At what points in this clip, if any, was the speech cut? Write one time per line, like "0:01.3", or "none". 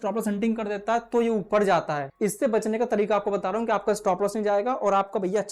0:02.0